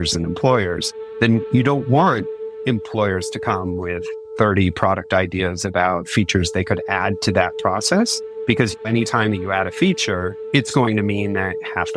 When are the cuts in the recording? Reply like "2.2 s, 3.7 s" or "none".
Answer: 4.2 s, 8.7 s, 10.3 s